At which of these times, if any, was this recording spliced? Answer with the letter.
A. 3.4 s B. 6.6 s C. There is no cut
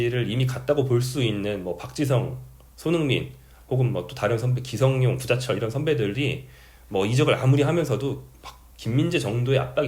C